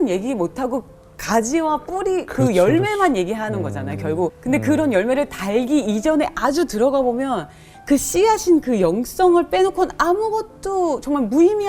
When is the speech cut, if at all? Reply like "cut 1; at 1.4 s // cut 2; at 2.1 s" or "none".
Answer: cut 1; at 4.4 s